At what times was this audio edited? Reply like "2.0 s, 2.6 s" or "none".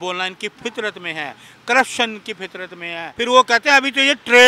3.1 s

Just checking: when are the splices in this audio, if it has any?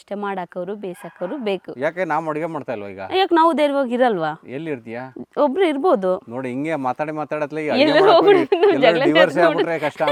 none

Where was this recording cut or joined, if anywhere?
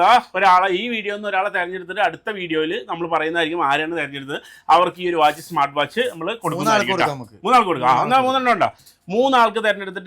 none

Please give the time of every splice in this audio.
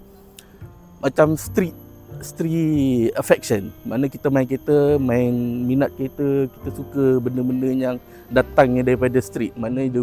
none

